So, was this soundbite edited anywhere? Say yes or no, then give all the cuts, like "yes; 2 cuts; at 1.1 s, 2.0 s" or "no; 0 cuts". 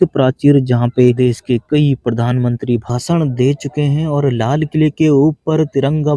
yes; 1 cut; at 1.2 s